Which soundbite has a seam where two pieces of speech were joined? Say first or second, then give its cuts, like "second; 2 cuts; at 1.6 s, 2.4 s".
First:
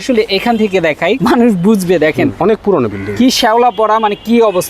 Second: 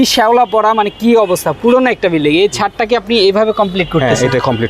first; 2 cuts; at 1.2 s, 2.3 s